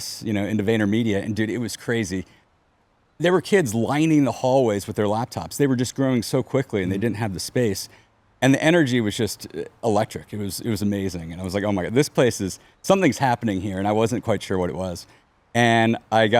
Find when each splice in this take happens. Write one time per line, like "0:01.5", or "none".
none